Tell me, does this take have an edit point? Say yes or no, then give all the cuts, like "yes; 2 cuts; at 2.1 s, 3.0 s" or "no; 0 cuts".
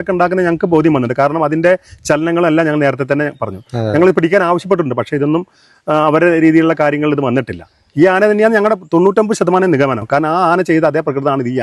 no; 0 cuts